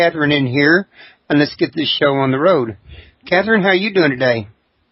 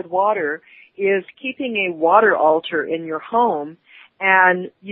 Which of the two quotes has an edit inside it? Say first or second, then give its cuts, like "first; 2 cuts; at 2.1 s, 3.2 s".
first; 1 cut; at 1.2 s